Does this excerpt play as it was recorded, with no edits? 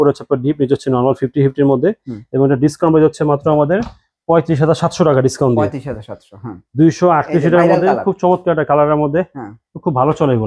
yes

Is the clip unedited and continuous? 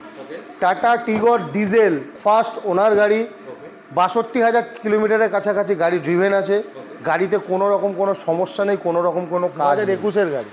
no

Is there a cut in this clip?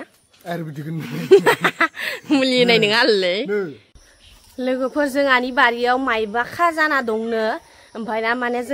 yes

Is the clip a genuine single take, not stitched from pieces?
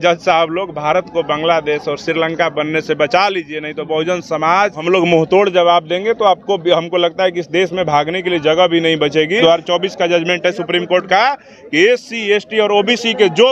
no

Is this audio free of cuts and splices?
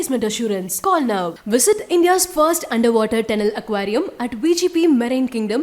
yes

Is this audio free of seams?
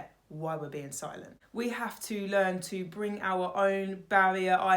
no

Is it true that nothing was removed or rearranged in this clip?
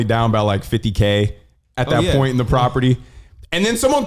yes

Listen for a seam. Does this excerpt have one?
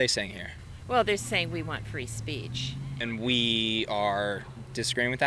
yes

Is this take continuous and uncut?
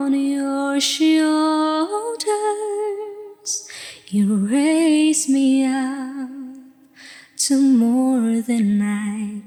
yes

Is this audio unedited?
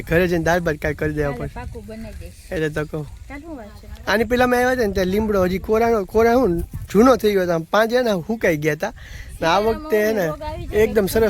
yes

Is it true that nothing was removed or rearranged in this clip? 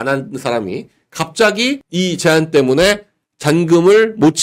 yes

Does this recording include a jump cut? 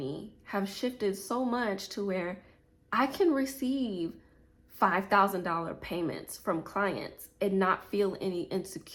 no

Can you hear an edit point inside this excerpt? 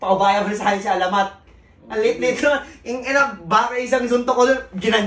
no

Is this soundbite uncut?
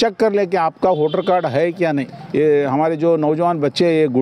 no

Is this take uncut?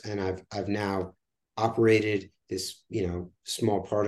yes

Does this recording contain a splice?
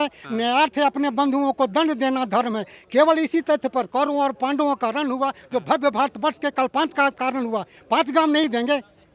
no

